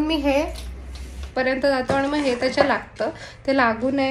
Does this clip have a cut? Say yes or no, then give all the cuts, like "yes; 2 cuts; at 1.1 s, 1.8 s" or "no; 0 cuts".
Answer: yes; 1 cut; at 1.3 s